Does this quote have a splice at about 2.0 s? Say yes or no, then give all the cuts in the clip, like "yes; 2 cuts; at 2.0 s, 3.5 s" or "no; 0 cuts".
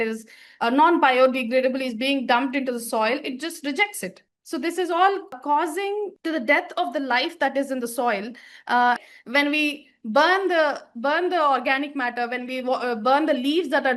no; 1 cut; at 9.0 s